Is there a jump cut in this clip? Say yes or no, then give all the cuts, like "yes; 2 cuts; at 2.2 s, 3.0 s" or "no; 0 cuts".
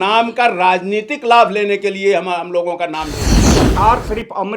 yes; 1 cut; at 3.6 s